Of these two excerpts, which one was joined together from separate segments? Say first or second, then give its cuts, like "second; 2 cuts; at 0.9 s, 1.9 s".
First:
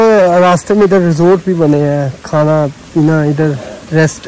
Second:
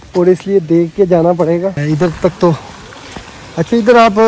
second; 1 cut; at 1.8 s